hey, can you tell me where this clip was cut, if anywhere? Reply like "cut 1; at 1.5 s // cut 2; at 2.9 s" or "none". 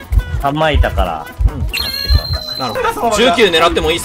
cut 1; at 2.8 s